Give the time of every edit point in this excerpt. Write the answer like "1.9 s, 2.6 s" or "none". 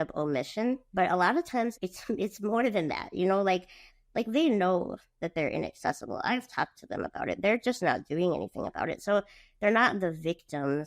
0.9 s, 1.8 s, 3.9 s